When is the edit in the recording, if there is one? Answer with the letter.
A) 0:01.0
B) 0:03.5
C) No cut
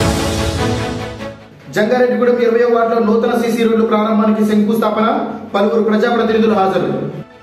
C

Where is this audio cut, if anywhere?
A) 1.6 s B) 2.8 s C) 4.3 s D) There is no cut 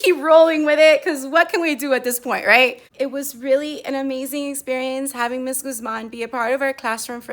B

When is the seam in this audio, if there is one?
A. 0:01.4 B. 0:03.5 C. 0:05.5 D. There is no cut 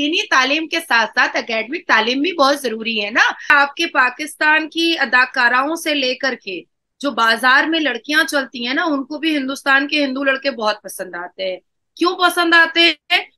B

